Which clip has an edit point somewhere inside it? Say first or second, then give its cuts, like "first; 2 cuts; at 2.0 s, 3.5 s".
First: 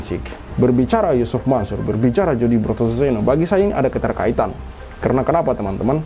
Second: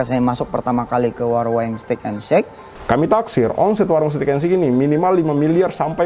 second; 1 cut; at 2.7 s